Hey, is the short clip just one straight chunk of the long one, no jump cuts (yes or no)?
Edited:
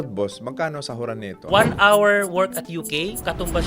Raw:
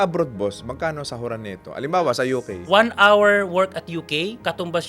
no